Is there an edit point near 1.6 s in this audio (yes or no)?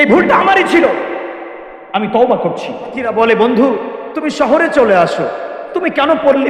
no